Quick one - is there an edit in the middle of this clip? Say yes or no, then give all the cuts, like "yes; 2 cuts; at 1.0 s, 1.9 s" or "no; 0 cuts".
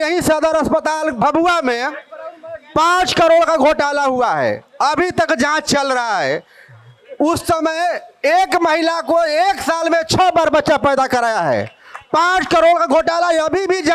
no; 0 cuts